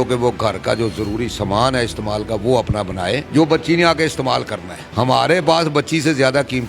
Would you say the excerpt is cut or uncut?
cut